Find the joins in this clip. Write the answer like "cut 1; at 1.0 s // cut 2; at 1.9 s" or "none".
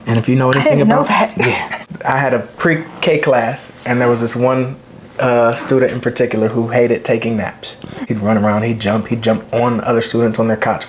cut 1; at 1.9 s // cut 2; at 8.0 s